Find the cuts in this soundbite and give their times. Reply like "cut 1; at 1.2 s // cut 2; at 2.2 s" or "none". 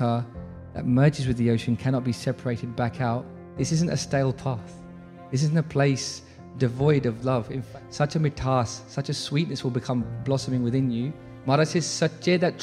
cut 1; at 3.4 s // cut 2; at 7.6 s // cut 3; at 11.3 s